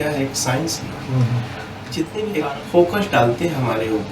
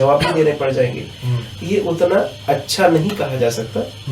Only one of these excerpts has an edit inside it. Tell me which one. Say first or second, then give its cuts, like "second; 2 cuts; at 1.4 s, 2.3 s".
first; 1 cut; at 2.3 s